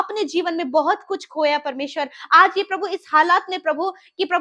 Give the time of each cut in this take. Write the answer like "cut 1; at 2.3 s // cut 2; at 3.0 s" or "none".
none